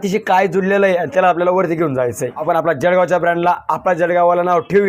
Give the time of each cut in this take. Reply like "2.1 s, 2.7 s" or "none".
2.4 s